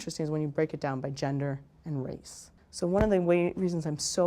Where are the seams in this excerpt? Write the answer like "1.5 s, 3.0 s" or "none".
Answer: 2.6 s

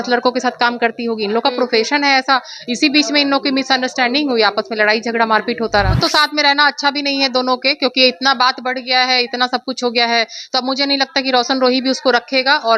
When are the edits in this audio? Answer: 5.9 s

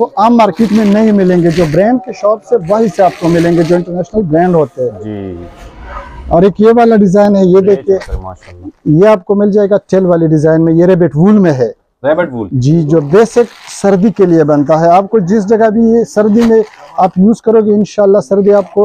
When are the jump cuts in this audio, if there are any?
none

